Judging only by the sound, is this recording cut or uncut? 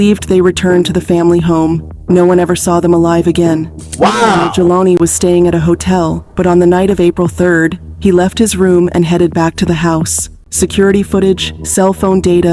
uncut